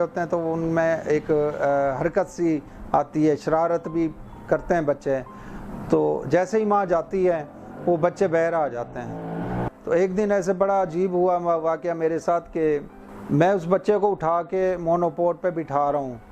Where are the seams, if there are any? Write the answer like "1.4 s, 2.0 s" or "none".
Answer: 9.6 s